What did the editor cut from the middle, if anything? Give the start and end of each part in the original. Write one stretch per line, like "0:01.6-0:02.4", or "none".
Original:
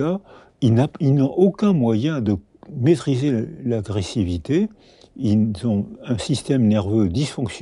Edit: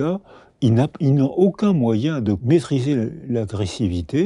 0:02.4-0:02.8